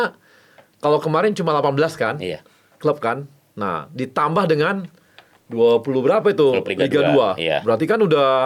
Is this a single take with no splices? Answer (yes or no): yes